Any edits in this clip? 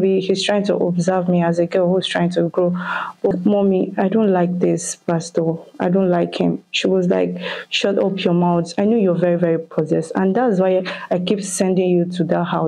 yes; 1 cut; at 3.3 s

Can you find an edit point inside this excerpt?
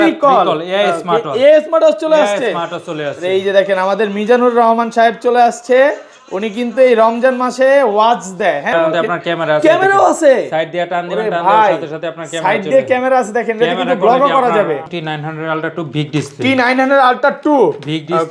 yes; 2 cuts; at 8.7 s, 14.9 s

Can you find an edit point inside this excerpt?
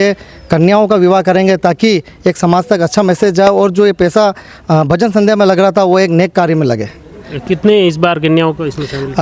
no; 0 cuts

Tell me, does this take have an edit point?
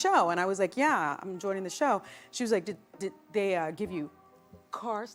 no; 0 cuts

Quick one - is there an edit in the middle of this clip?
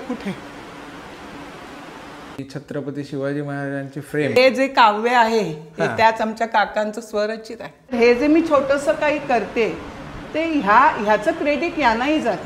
yes; 3 cuts; at 2.4 s, 4.4 s, 7.9 s

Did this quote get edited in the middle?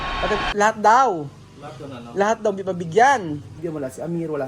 yes; 1 cut; at 3.5 s

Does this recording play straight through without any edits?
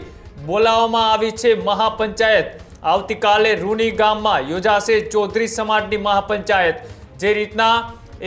yes; 0 cuts

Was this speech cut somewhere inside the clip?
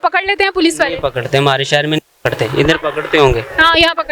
no; 0 cuts

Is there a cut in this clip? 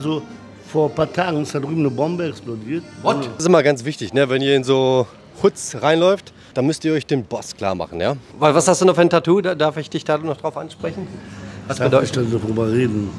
yes; 3 cuts; at 3.3 s, 6.4 s, 8.3 s

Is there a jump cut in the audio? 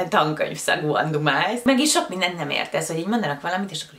yes; 1 cut; at 1.6 s

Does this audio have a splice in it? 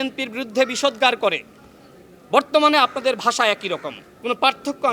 no; 0 cuts

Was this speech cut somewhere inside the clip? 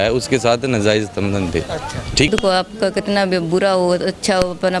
yes; 1 cut; at 2.3 s

